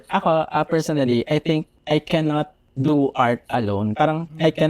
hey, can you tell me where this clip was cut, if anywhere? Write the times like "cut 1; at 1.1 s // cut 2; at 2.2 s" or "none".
cut 1; at 1.7 s // cut 2; at 2.6 s